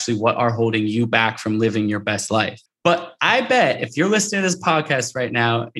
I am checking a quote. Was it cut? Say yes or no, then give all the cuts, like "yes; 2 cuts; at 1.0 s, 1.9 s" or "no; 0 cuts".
yes; 1 cut; at 2.6 s